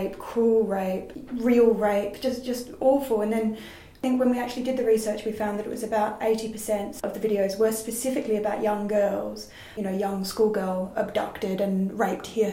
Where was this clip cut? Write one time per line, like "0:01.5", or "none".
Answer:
0:03.9
0:06.9
0:09.7